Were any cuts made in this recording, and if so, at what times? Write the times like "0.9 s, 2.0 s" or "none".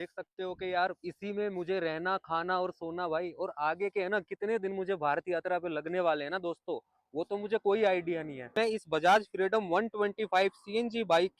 8.5 s